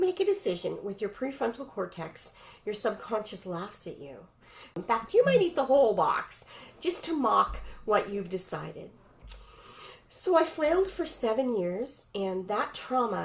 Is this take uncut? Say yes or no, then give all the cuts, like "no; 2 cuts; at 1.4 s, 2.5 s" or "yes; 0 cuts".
no; 1 cut; at 4.8 s